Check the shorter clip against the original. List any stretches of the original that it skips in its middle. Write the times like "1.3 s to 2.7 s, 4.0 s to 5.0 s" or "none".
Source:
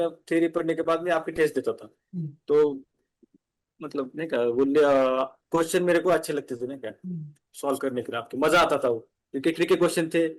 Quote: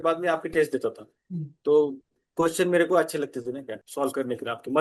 3.1 s to 5.4 s, 6.9 s to 7.4 s